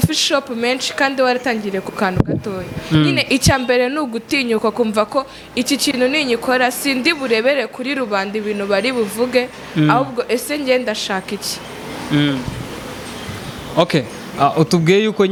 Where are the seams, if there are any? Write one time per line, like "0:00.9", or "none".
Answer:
none